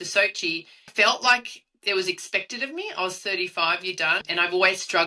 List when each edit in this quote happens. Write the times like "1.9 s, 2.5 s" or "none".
0.9 s, 4.2 s